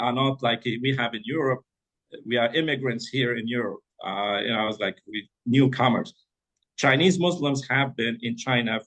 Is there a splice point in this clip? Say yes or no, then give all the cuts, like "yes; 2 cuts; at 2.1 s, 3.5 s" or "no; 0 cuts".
no; 0 cuts